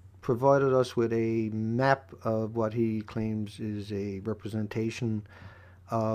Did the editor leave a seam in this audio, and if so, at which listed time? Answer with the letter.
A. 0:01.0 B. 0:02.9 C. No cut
C